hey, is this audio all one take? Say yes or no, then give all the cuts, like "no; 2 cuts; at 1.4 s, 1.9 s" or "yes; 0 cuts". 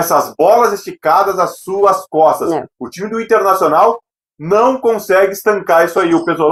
yes; 0 cuts